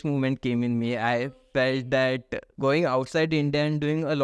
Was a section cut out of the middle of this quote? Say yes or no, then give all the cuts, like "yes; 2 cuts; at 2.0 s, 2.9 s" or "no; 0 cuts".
yes; 1 cut; at 2.4 s